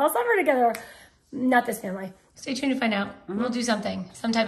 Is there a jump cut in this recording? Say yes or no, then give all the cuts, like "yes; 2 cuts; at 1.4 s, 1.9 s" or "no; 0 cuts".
yes; 1 cut; at 2.1 s